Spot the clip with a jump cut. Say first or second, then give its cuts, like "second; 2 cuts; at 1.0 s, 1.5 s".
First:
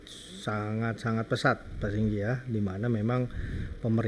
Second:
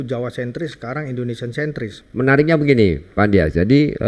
second; 1 cut; at 2.0 s